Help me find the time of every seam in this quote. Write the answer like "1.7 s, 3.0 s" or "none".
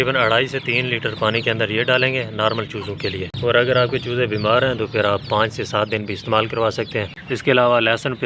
3.3 s, 7.2 s

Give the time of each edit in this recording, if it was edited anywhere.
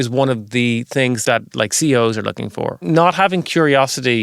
1.2 s, 2.9 s

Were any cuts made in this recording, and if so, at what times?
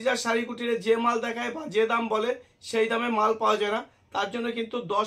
none

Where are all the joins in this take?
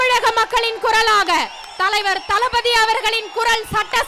none

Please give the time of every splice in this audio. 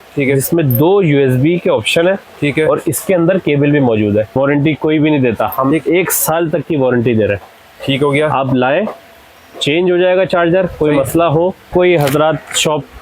4.3 s, 11.7 s

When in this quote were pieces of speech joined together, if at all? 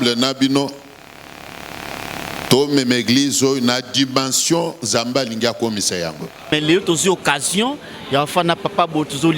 6.5 s

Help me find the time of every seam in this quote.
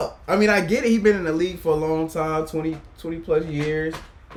none

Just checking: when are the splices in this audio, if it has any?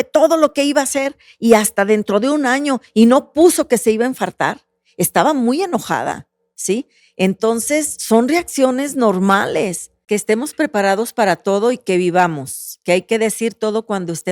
10.0 s

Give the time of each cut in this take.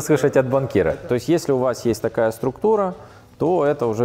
0.9 s

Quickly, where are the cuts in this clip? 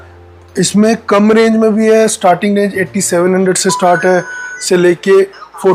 none

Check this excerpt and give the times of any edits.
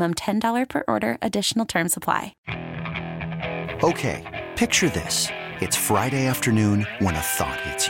2.4 s

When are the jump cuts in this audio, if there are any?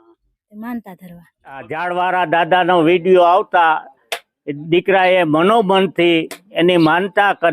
1.7 s

